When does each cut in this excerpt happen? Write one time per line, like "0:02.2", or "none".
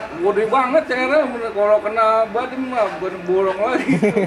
none